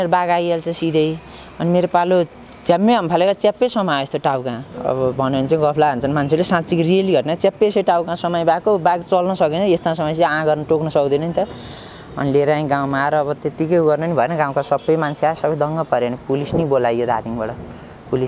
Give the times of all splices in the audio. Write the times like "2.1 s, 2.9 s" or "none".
none

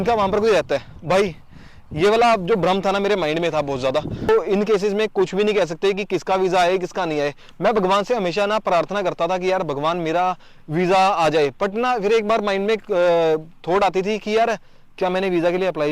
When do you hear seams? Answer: 4.2 s

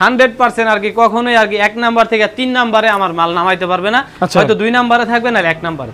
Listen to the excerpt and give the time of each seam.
none

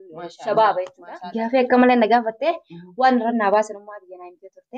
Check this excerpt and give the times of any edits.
1.0 s

